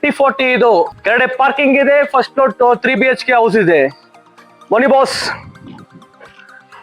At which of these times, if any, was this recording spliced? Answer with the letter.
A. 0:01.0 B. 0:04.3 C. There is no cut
A